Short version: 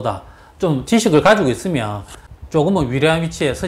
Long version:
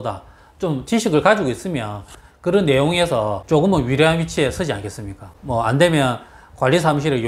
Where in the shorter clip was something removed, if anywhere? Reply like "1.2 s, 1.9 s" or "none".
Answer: 2.4 s

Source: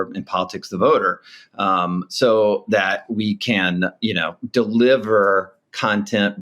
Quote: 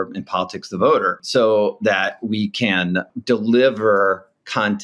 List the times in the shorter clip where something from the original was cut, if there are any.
1.2 s, 3.1 s

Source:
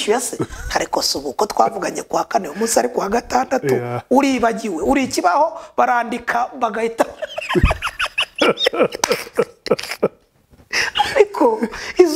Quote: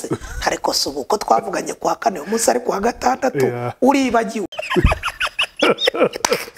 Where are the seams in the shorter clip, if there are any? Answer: 4.5 s

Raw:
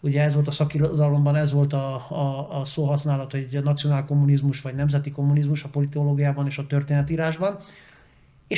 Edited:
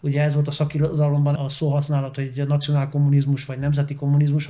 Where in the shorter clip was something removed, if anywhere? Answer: 1.3 s

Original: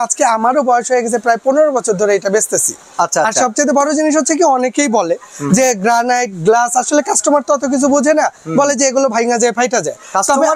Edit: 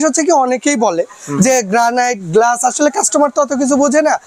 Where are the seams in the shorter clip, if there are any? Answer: none

